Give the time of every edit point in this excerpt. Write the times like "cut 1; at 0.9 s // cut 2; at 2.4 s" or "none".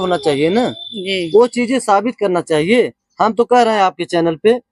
none